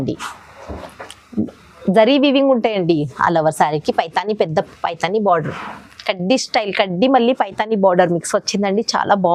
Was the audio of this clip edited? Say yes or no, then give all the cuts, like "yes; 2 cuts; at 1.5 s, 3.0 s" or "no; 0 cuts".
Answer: no; 0 cuts